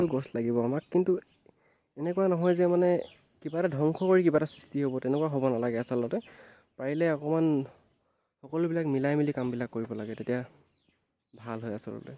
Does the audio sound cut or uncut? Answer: uncut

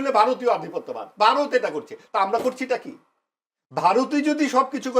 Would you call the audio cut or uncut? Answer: uncut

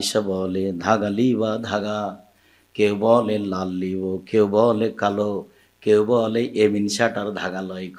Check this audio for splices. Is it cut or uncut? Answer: uncut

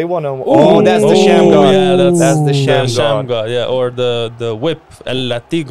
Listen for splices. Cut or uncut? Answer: uncut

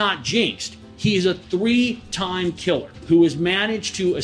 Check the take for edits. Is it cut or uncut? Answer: cut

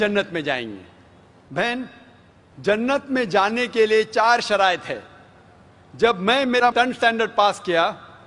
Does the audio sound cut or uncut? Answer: uncut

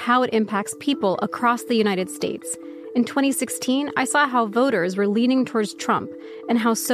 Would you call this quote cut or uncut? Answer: uncut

